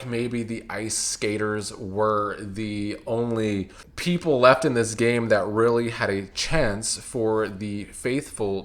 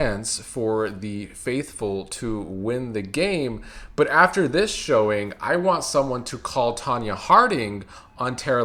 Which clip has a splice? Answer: first; 1 cut; at 3.8 s

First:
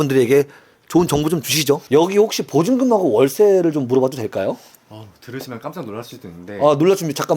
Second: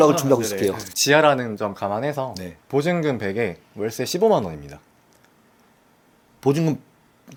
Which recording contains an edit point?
first; 1 cut; at 1.8 s

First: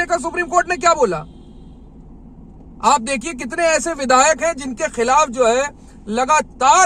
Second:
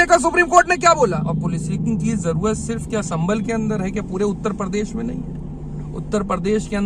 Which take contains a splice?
second; 1 cut; at 1.3 s

